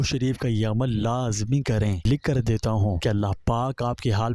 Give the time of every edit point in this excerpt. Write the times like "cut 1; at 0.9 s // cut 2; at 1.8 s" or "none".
cut 1; at 2.0 s // cut 2; at 3.0 s